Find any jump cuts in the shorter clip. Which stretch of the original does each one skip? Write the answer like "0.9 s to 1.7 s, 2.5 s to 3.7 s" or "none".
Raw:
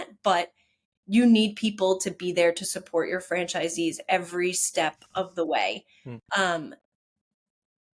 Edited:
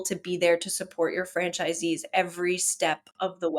none